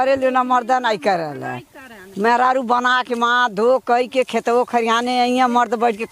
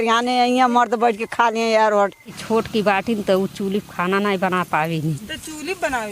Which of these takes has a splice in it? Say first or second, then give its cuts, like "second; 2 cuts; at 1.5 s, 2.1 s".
second; 1 cut; at 2.4 s